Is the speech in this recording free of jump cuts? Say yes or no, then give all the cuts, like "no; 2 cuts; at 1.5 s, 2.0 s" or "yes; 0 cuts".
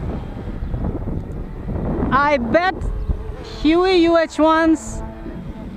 yes; 0 cuts